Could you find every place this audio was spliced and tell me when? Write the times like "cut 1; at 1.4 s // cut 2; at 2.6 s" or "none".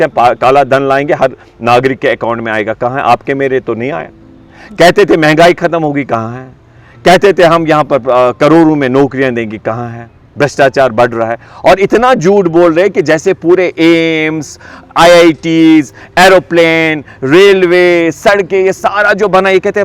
none